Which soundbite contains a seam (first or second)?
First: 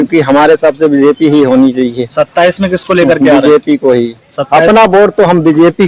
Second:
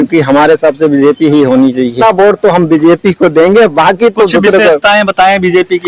second